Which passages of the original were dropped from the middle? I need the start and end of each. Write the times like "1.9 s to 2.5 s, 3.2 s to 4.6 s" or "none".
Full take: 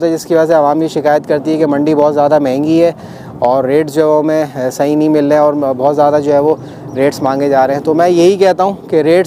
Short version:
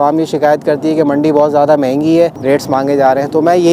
3.0 s to 6.9 s